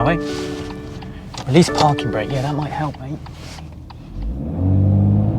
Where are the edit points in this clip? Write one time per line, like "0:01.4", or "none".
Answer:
none